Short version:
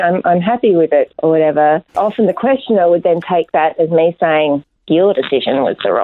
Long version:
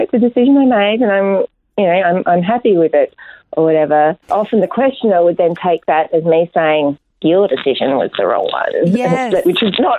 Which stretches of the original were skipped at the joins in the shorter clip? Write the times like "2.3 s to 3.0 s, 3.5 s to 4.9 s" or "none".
3.1 s to 3.5 s